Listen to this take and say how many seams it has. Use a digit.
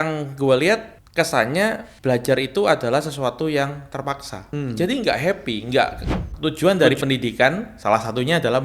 4